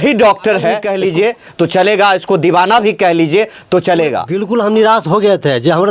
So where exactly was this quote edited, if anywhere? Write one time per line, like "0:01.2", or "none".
0:00.9
0:04.3